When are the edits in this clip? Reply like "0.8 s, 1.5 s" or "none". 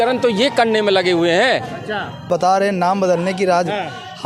2.3 s